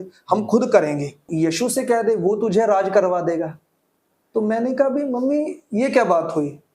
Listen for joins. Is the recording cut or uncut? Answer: cut